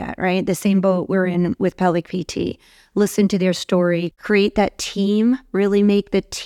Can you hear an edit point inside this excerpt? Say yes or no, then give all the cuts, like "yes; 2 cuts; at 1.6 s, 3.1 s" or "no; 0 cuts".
yes; 1 cut; at 4.1 s